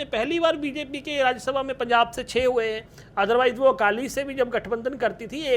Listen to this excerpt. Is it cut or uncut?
uncut